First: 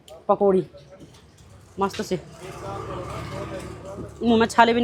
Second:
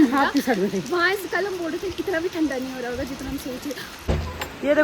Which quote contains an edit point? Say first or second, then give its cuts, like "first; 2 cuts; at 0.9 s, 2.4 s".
second; 1 cut; at 3.9 s